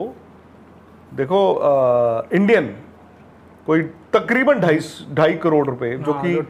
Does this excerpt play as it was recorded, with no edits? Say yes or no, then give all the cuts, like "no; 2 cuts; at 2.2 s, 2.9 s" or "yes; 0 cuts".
yes; 0 cuts